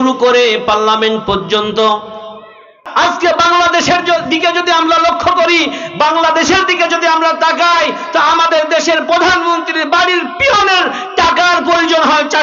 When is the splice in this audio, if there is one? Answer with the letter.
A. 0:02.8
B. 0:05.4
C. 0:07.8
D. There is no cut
A